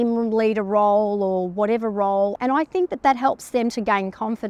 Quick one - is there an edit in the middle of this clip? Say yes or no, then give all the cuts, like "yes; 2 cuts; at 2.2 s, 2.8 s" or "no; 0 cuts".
yes; 1 cut; at 2.3 s